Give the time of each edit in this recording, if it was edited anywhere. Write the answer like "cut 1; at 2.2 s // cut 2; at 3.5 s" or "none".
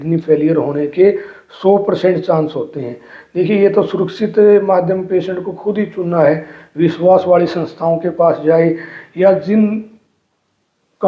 none